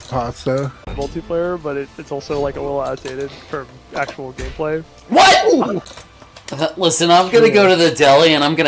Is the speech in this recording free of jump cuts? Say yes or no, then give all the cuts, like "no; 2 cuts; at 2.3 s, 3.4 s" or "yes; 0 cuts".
no; 2 cuts; at 0.9 s, 5.8 s